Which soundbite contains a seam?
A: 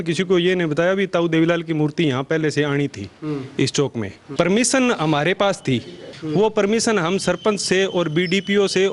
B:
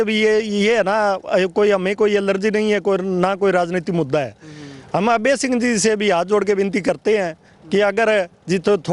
A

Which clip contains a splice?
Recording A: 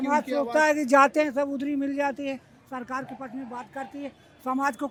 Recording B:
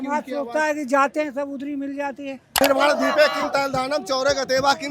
B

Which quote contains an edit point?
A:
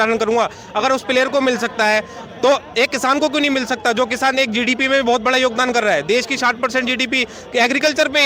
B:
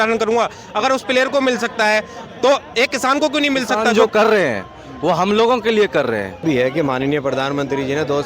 B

